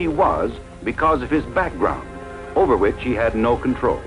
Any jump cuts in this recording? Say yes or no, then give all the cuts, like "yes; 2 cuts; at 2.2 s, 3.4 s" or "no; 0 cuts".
yes; 1 cut; at 1.4 s